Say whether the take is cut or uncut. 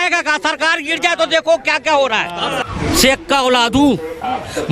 cut